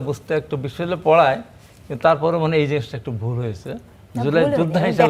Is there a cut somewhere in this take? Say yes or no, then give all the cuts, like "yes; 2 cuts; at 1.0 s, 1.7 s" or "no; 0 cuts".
no; 0 cuts